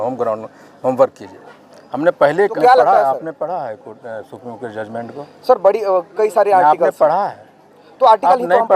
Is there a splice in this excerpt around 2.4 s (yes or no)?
yes